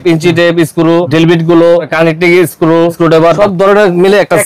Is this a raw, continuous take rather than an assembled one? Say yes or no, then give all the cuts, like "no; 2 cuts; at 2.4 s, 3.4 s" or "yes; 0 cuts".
no; 3 cuts; at 1.1 s, 1.9 s, 3.3 s